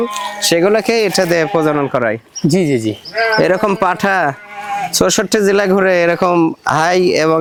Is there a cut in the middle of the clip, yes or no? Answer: no